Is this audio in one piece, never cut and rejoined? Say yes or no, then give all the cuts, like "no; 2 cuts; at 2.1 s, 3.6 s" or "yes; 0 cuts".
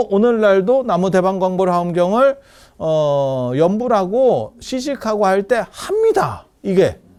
yes; 0 cuts